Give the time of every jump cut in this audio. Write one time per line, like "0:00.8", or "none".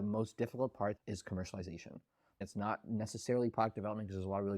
0:01.0
0:02.5